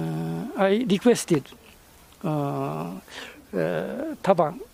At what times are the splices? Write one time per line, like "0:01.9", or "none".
none

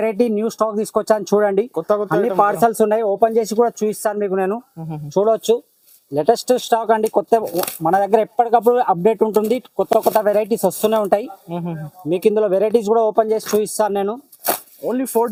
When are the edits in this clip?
none

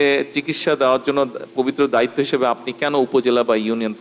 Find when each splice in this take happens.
none

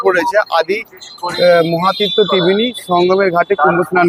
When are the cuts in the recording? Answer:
none

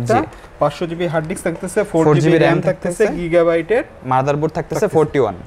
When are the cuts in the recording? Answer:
none

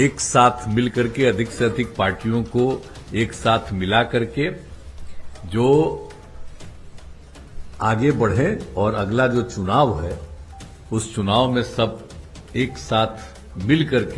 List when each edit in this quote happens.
none

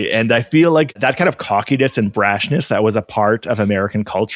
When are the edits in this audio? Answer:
0:01.0

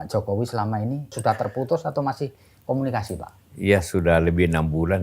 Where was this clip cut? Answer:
0:01.2

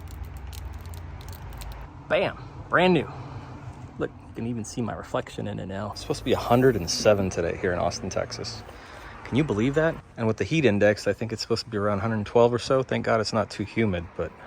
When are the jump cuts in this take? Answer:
0:01.9
0:05.9
0:10.1

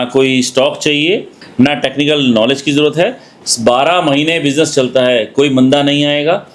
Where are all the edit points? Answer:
0:01.4

